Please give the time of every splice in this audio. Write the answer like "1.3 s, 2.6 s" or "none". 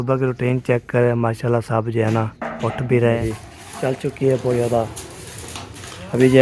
3.2 s